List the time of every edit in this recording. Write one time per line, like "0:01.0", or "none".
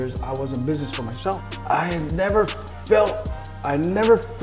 0:01.4